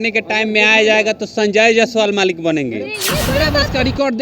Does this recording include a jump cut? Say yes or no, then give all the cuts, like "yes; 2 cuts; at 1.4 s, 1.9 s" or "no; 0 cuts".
yes; 1 cut; at 3.3 s